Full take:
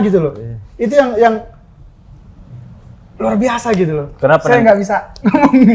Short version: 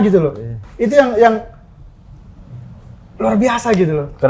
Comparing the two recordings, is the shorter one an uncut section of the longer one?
yes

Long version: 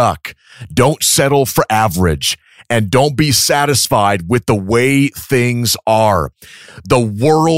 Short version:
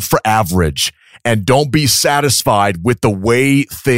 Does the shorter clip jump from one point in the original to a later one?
no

